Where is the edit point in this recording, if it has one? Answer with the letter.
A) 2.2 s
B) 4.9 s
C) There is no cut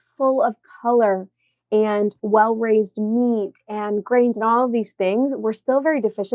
A